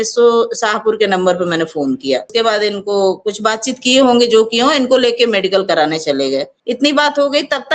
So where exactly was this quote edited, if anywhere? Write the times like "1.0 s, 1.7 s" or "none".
2.3 s, 6.5 s